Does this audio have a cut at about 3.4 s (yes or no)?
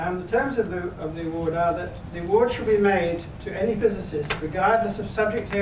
yes